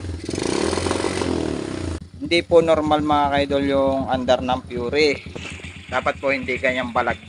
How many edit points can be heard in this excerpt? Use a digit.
1